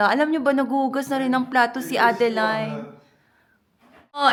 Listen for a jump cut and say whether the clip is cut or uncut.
uncut